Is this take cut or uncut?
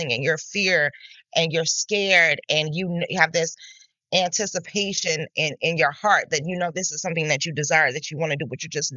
uncut